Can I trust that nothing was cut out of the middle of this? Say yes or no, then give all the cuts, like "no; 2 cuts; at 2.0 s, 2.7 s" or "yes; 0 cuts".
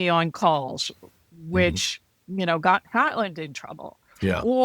yes; 0 cuts